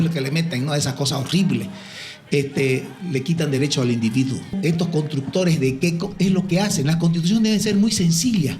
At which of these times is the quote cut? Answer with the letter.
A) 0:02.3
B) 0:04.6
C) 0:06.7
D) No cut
B